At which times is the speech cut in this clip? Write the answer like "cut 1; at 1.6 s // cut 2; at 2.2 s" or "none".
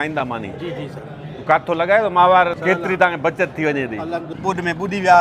cut 1; at 2.6 s // cut 2; at 4.3 s